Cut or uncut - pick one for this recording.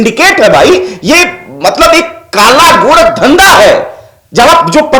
uncut